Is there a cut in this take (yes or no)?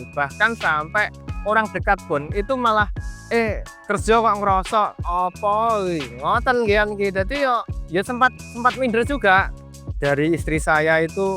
yes